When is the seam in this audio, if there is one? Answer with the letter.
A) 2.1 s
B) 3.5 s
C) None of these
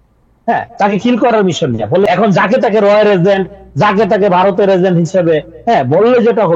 A